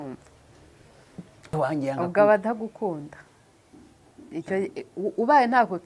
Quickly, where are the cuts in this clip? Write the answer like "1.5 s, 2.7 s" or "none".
1.5 s